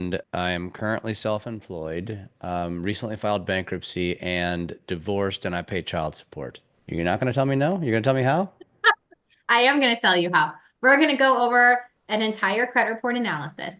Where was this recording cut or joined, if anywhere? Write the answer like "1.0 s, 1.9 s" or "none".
6.7 s